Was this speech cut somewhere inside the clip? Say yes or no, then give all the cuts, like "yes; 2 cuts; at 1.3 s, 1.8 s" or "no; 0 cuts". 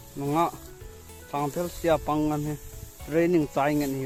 no; 0 cuts